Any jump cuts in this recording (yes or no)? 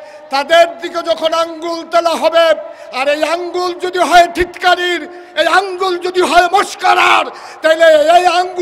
no